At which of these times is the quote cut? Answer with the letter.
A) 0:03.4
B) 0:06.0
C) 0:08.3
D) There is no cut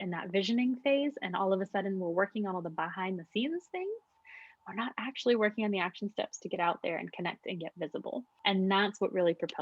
C